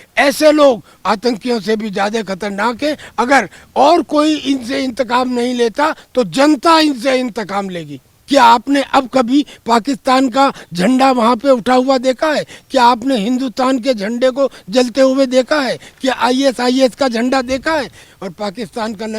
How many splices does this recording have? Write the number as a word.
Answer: two